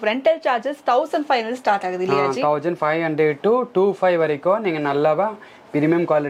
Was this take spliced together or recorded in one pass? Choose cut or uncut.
uncut